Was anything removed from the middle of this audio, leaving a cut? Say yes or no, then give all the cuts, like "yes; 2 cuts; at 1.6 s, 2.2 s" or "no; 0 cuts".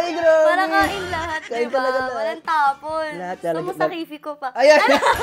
no; 0 cuts